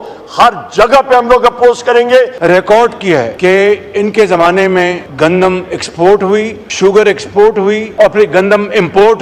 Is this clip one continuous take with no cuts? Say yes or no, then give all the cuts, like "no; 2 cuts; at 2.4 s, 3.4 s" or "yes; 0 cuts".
no; 5 cuts; at 2.4 s, 3.3 s, 5.0 s, 6.6 s, 7.9 s